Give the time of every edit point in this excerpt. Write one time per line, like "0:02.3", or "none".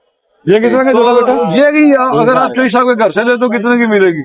0:01.4